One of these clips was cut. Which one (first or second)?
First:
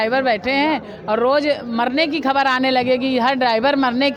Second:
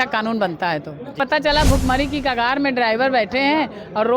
second